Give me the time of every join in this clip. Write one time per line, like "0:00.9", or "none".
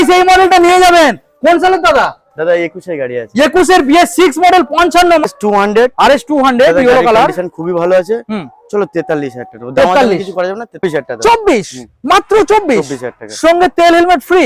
0:05.3
0:10.8